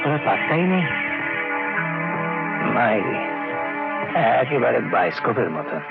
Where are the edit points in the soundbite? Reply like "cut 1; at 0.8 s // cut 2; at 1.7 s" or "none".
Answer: none